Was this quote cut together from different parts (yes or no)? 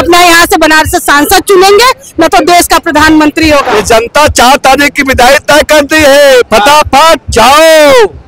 yes